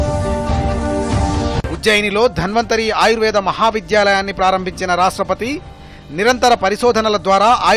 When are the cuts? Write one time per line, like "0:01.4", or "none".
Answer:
0:01.6